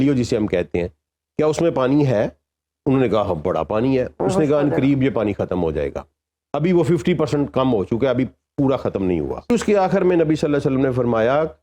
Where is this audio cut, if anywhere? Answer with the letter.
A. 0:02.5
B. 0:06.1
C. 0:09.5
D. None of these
C